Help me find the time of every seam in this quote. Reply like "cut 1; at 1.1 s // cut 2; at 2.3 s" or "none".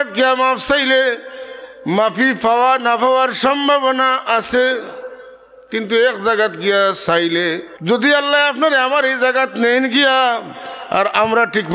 cut 1; at 7.7 s